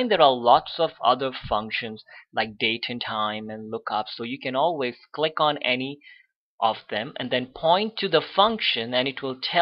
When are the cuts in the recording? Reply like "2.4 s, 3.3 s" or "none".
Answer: 7.5 s